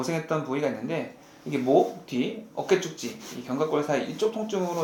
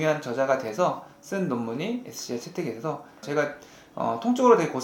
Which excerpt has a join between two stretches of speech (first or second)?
second